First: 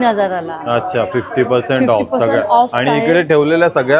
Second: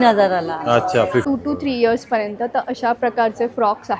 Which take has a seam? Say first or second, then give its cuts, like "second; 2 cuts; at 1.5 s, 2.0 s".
second; 1 cut; at 1.3 s